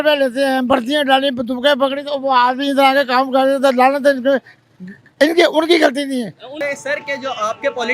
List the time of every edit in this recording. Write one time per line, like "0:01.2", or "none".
0:06.5